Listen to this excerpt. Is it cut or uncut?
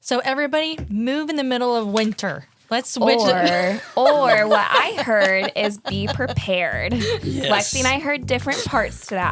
uncut